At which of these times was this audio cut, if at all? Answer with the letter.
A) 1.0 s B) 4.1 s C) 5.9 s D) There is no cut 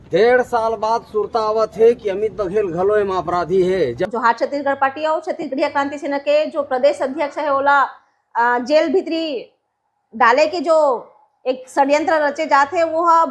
B